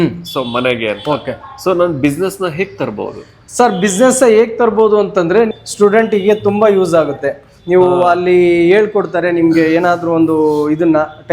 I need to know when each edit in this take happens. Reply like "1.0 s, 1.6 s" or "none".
5.5 s